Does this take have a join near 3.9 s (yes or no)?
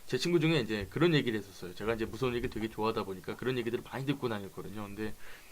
yes